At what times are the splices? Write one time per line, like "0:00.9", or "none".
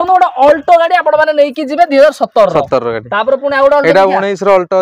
none